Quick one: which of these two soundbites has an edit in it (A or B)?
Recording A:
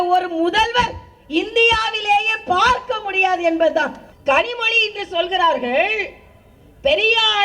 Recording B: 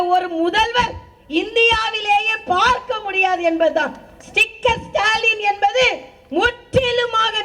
A